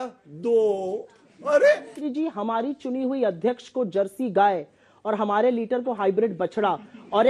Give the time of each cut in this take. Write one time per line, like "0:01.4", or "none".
0:02.0